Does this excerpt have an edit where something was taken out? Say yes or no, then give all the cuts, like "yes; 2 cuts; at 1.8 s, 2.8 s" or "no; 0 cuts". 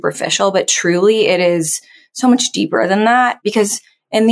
yes; 1 cut; at 3.4 s